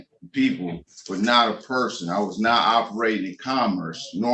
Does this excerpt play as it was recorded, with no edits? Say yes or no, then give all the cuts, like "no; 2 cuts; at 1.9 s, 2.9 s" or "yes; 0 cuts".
yes; 0 cuts